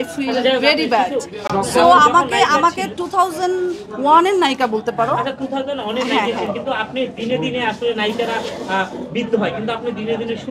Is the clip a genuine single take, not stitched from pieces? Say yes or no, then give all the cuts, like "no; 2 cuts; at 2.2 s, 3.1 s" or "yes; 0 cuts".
yes; 0 cuts